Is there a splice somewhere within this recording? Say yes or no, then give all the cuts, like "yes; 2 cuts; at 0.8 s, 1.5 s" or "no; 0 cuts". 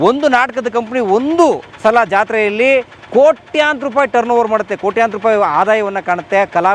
no; 0 cuts